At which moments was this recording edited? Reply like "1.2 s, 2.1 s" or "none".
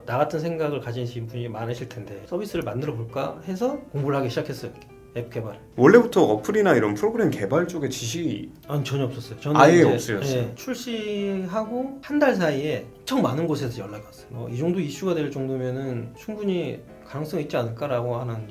2.2 s, 5.6 s, 10.6 s